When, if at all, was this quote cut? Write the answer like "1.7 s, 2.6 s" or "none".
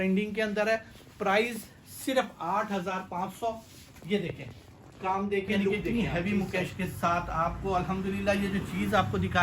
5.8 s